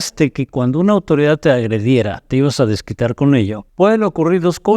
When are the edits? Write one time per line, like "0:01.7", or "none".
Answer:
0:03.6